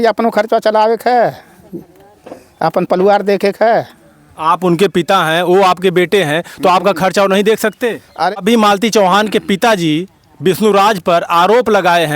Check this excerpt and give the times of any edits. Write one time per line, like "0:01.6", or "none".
0:08.4